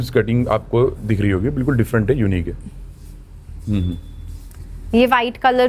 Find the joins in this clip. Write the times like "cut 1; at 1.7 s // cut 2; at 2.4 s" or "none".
none